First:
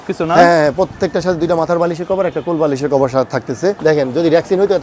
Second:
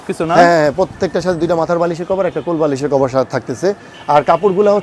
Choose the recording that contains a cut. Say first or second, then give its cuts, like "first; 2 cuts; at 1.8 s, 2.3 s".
first; 1 cut; at 3.8 s